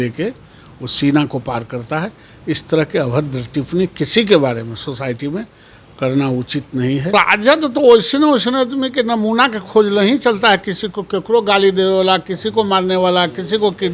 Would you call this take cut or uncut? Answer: cut